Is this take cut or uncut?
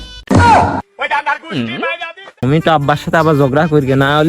cut